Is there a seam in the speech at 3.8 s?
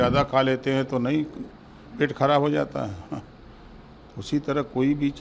no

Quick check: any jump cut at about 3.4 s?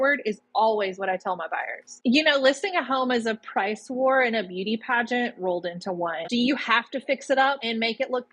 no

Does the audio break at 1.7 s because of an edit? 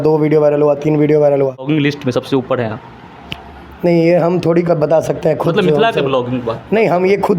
yes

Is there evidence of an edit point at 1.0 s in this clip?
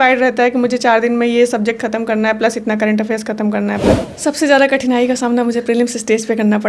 no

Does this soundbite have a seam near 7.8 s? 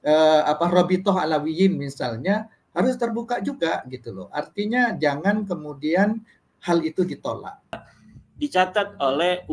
yes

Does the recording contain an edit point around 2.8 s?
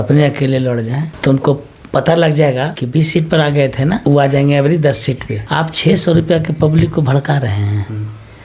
yes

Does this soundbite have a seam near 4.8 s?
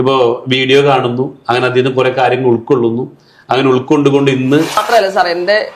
yes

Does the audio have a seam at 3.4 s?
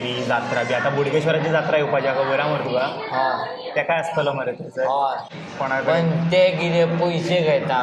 no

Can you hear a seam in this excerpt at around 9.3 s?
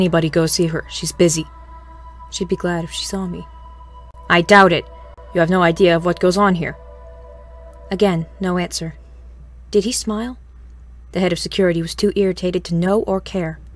no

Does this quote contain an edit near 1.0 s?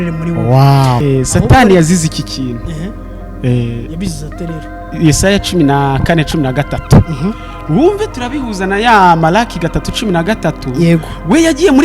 yes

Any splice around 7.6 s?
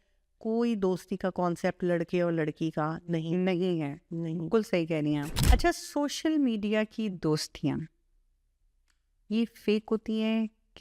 no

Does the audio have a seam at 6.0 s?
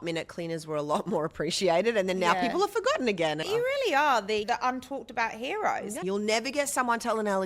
yes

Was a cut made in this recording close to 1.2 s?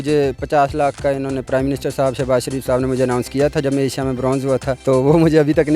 no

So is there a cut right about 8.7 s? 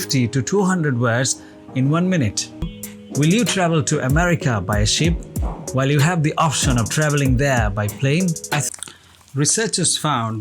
yes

